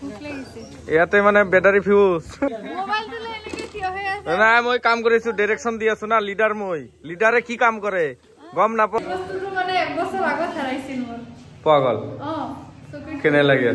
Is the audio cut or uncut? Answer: cut